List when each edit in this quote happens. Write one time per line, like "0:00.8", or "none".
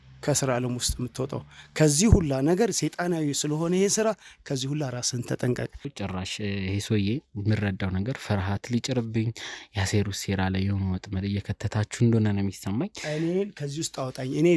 0:05.9